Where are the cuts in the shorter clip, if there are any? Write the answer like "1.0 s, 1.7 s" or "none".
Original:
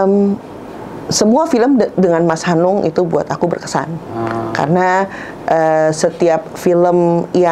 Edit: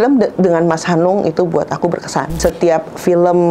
2.4 s